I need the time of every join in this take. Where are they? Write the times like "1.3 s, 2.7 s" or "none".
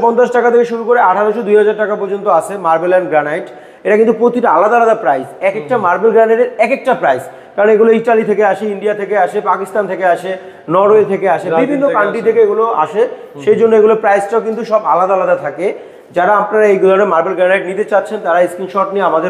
none